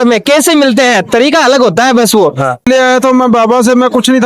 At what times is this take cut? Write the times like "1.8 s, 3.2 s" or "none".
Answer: 2.7 s